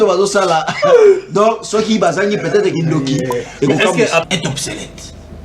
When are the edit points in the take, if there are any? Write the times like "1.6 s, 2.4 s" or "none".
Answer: 4.2 s